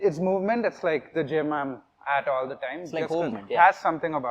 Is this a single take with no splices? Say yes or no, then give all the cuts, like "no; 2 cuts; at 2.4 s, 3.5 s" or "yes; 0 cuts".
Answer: yes; 0 cuts